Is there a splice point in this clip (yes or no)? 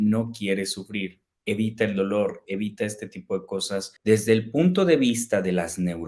yes